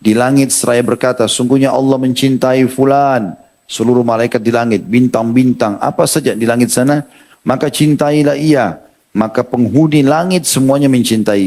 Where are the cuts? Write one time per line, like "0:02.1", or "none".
none